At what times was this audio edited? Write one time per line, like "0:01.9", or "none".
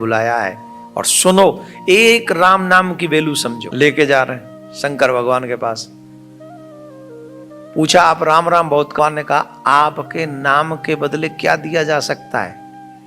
0:03.6
0:09.0

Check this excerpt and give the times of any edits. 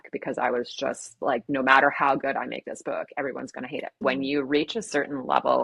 0:04.0

